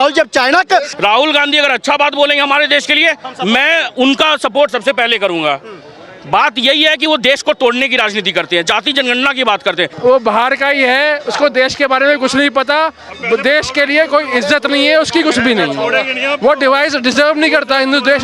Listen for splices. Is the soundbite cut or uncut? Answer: cut